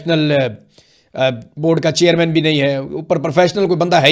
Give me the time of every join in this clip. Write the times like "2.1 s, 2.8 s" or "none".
none

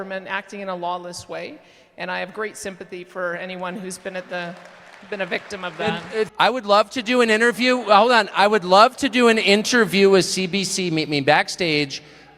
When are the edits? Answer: 6.3 s

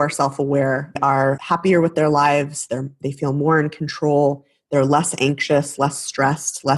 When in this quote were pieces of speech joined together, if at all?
1.3 s

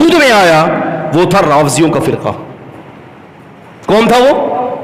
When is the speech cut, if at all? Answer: none

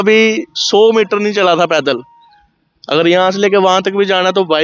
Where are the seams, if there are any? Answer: none

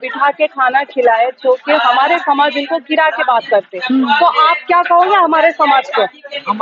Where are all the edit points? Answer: none

